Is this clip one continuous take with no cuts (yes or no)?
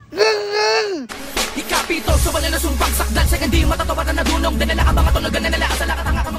no